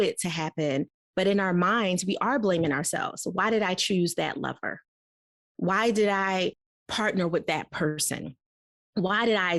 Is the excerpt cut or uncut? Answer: uncut